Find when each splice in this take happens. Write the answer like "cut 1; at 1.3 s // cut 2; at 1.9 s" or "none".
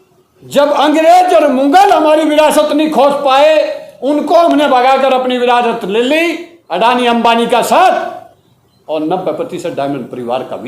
cut 1; at 6.5 s

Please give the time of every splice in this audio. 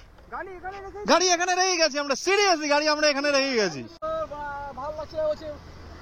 cut 1; at 3.9 s

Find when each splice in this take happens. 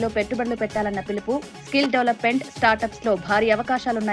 none

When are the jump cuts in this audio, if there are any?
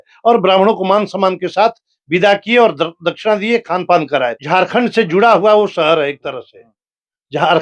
cut 1; at 4.4 s

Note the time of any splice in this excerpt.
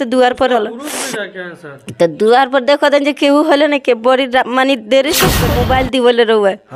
cut 1; at 5.4 s

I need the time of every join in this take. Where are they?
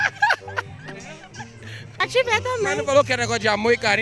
cut 1; at 2.0 s

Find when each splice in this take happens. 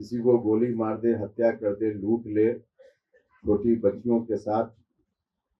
none

